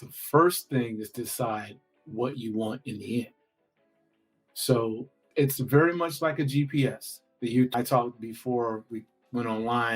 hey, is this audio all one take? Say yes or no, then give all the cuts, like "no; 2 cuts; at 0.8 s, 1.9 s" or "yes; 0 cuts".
no; 2 cuts; at 5.2 s, 7.7 s